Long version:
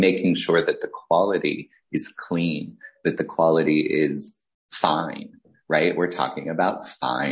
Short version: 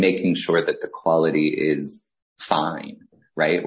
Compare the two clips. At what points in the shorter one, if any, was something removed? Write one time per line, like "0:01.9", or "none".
0:00.9